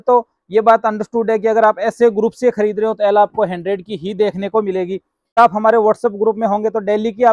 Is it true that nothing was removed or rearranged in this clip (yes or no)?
no